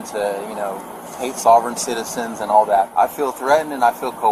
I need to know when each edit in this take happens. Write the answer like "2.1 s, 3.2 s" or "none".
2.9 s